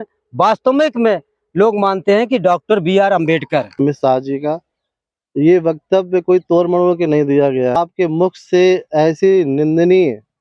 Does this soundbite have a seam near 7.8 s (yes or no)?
yes